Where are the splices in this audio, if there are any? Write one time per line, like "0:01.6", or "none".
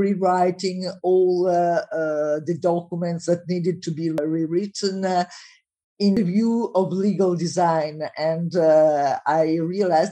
0:04.2
0:06.2